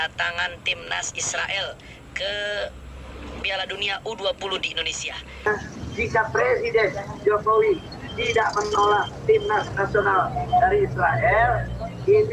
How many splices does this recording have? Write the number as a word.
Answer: one